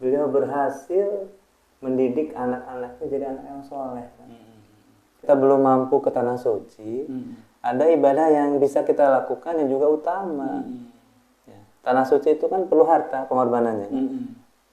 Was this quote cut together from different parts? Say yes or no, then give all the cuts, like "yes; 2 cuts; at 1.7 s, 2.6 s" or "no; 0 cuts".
yes; 1 cut; at 5.2 s